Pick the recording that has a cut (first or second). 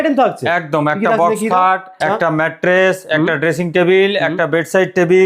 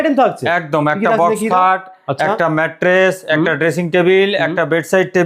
first